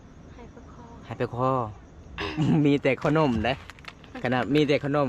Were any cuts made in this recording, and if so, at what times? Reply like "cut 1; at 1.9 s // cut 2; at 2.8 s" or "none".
cut 1; at 2.1 s